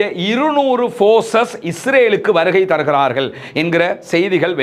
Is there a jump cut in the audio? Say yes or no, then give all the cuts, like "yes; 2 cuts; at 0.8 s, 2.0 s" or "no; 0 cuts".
no; 0 cuts